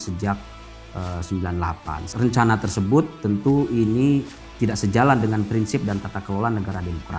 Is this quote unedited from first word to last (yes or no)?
no